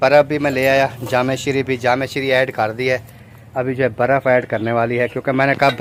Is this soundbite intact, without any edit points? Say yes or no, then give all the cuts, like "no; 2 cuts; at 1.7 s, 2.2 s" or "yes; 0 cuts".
yes; 0 cuts